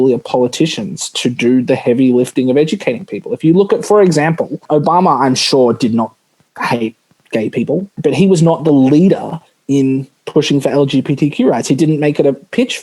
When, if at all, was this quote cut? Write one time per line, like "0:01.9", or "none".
0:04.6
0:07.9